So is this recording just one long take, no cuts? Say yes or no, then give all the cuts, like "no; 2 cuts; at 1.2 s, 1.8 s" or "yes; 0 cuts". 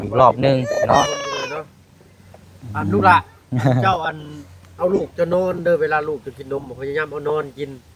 yes; 0 cuts